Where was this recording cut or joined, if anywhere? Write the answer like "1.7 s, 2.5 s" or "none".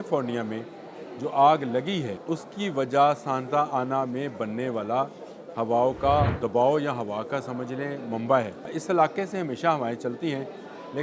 2.2 s, 6.4 s, 8.8 s

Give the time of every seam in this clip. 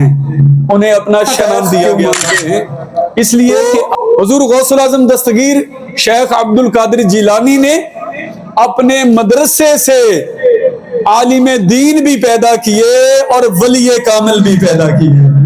3.9 s

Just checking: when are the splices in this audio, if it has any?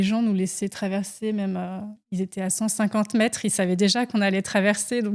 none

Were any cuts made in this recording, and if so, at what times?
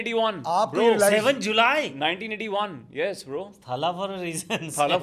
none

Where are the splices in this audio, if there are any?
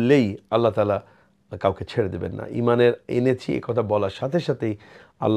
none

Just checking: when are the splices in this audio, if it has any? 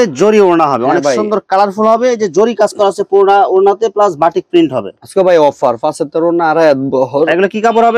none

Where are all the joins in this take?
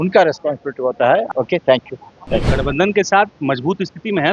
1.3 s, 2.4 s

